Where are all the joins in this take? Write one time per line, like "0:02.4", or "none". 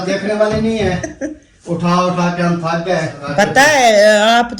0:03.2